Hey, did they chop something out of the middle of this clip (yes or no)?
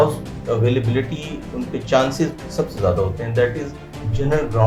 no